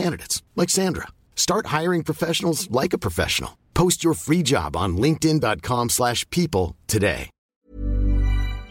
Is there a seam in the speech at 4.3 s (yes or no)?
no